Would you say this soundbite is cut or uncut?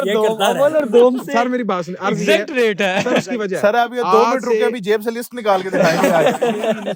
uncut